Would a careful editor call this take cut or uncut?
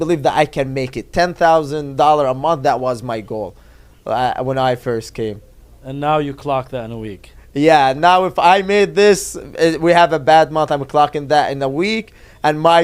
uncut